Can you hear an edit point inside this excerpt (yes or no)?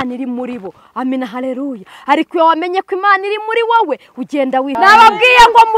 yes